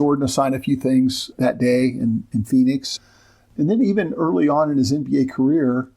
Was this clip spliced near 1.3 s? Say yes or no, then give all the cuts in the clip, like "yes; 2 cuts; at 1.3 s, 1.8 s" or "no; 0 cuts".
yes; 2 cuts; at 1.3 s, 2.9 s